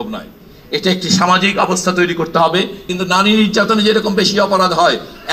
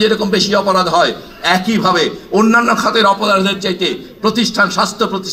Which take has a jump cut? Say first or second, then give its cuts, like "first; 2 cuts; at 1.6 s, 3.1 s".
first; 1 cut; at 2.9 s